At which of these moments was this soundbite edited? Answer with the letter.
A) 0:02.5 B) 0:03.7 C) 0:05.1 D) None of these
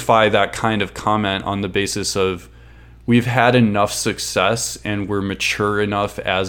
D